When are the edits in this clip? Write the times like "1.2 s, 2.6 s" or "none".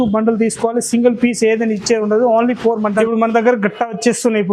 3.0 s